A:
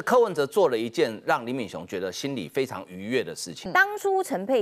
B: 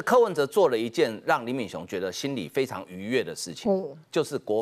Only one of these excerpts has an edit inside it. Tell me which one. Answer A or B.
A